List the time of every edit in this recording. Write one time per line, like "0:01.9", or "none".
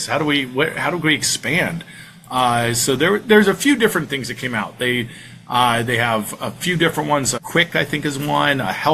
none